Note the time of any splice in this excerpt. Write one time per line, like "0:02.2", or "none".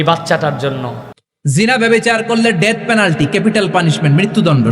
0:01.2